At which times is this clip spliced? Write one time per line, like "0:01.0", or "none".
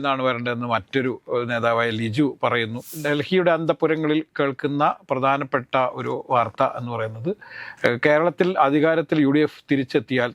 0:02.9

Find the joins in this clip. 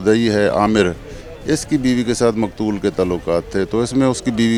none

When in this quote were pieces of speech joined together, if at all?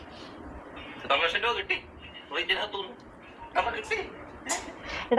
none

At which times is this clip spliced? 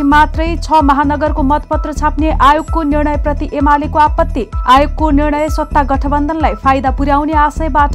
none

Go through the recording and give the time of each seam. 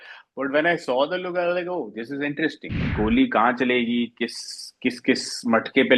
0:02.8

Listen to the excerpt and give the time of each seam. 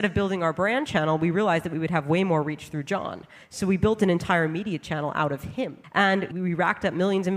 0:06.2

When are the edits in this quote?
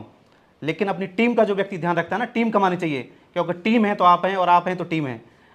none

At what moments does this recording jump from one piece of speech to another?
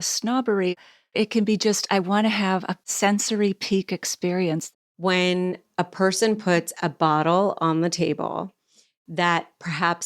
0:00.7
0:02.8
0:04.7

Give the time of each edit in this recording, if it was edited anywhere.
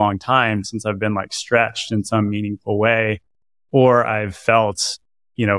none

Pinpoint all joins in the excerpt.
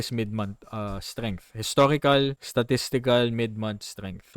0:02.4

